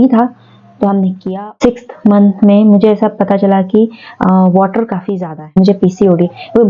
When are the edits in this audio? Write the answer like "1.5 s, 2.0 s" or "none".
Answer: 1.2 s, 5.5 s